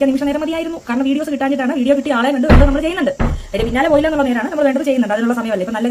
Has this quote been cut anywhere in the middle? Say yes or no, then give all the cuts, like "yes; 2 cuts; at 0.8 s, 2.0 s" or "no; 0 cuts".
no; 0 cuts